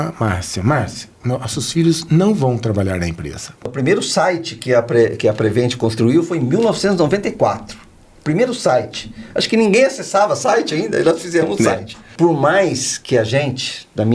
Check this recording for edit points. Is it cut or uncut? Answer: cut